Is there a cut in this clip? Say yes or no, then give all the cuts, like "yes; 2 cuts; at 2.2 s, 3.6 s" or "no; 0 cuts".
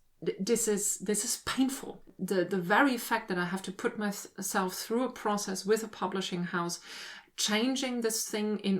yes; 1 cut; at 2.1 s